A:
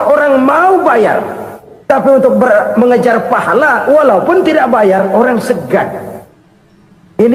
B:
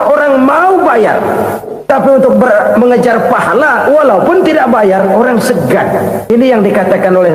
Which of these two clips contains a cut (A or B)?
B